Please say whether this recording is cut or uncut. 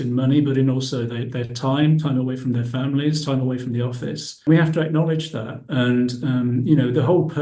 cut